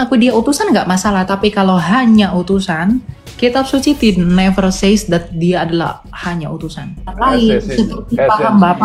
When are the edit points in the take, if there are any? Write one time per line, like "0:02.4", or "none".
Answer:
0:07.1